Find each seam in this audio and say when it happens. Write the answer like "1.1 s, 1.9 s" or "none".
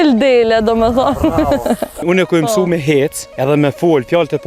2.0 s, 3.2 s